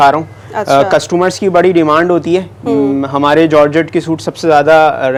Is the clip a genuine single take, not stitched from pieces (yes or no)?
yes